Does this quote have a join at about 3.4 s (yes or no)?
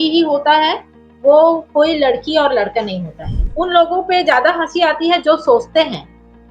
yes